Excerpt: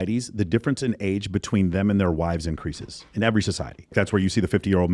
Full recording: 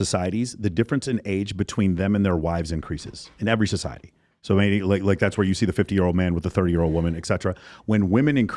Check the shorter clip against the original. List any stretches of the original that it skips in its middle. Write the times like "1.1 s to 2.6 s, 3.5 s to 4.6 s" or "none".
4.2 s to 5.2 s